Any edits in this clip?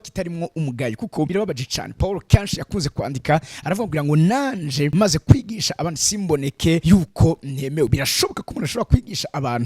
yes; 3 cuts; at 1.3 s, 4.9 s, 6.8 s

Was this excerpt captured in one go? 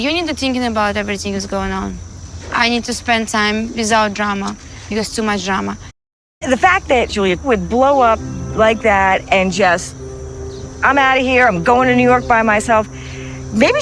no; 1 cut; at 6.0 s

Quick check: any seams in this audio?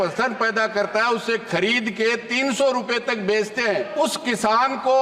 yes; 1 cut; at 3.9 s

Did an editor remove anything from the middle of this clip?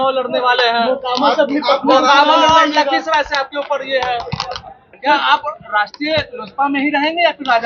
yes; 1 cut; at 4.9 s

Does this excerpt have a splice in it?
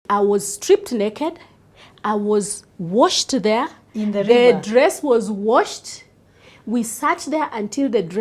no; 0 cuts

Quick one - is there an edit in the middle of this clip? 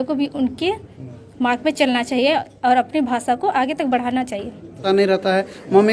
yes; 1 cut; at 4.8 s

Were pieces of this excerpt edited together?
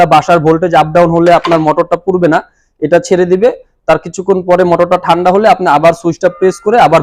no; 0 cuts

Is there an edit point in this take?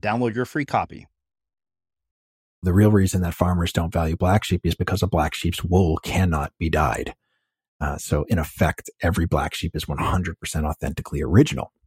yes; 1 cut; at 2.6 s

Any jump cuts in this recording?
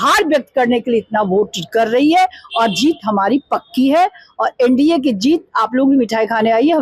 no; 0 cuts

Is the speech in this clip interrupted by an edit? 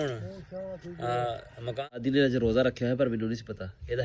yes; 1 cut; at 1.8 s

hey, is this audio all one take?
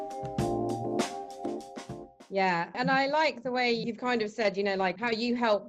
yes; 0 cuts

